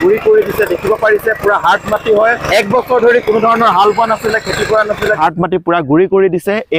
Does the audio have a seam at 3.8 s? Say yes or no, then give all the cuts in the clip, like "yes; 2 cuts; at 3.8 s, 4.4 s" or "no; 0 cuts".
no; 2 cuts; at 2.4 s, 5.2 s